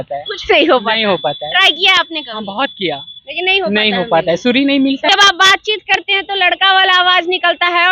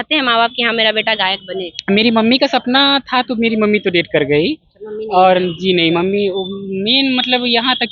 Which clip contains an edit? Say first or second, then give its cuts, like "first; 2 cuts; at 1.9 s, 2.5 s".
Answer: first; 1 cut; at 5.1 s